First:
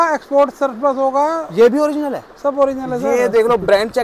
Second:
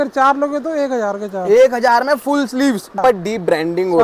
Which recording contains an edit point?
second; 1 cut; at 3.0 s

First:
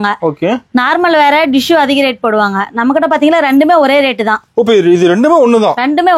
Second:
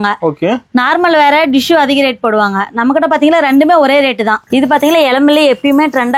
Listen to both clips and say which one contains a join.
second; 1 cut; at 4.4 s

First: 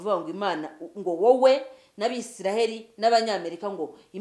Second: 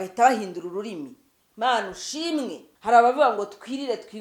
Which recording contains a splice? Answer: second; 1 cut; at 2.7 s

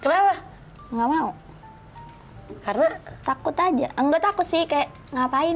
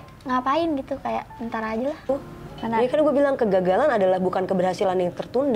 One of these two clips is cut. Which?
second; 1 cut; at 2.1 s

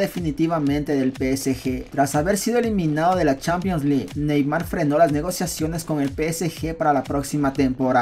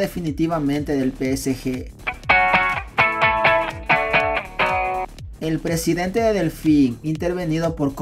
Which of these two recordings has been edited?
second; 1 cut; at 1.8 s

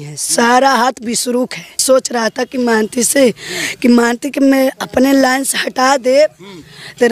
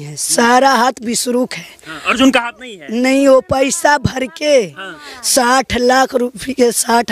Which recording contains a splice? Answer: first; 1 cut; at 1.8 s

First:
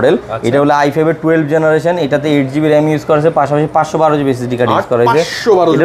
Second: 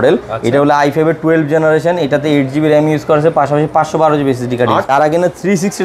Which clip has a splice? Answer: second; 1 cut; at 4.9 s

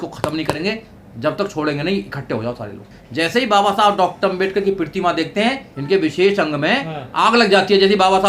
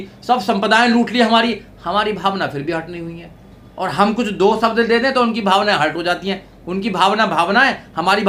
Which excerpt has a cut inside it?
first; 2 cuts; at 2.8 s, 5.7 s

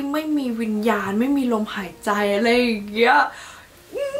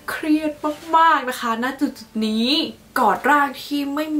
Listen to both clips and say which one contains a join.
second; 1 cut; at 2.9 s

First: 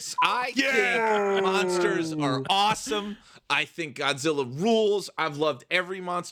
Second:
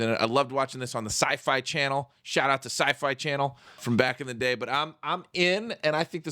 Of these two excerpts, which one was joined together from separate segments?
second; 1 cut; at 3.8 s

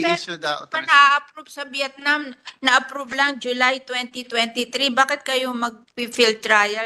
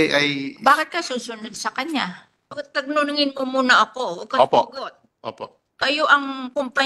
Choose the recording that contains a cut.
second; 1 cut; at 2.5 s

